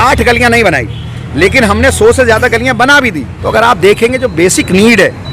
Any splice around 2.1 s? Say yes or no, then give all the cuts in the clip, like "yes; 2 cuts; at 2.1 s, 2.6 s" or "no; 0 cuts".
no; 1 cut; at 3.3 s